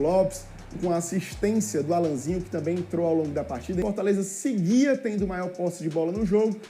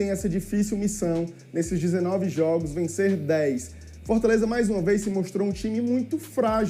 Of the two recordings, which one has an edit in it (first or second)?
first